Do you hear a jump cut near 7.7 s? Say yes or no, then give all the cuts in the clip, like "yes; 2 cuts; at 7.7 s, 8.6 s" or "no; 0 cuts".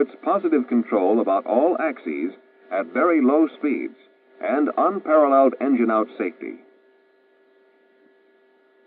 no; 1 cut; at 3.4 s